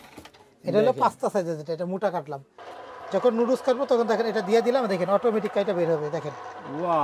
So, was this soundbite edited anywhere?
yes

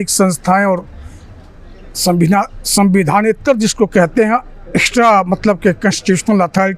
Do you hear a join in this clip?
no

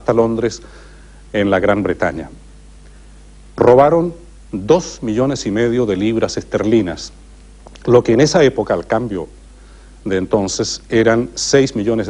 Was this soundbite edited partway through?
yes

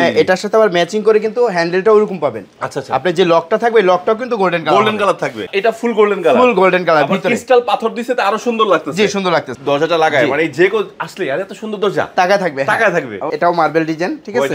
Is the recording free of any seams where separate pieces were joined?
no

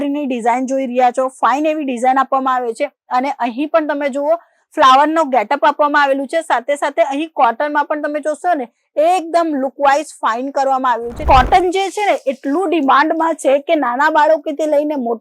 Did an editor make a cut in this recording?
yes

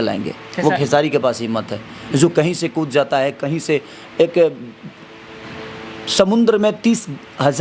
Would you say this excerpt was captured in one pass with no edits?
yes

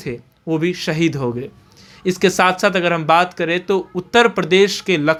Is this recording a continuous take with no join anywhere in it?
yes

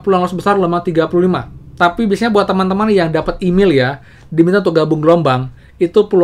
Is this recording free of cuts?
no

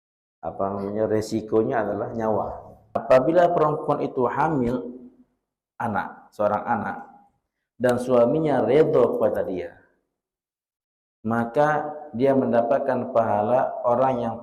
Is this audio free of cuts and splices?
no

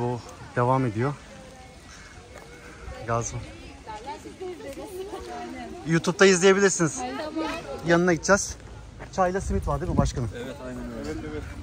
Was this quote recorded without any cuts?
no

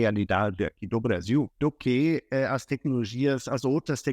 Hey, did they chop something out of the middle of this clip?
yes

